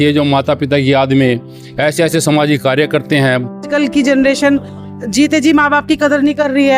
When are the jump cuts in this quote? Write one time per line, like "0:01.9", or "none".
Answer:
0:03.7